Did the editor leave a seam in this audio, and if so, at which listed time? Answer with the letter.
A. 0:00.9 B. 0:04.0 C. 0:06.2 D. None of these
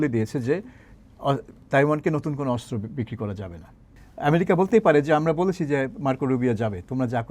B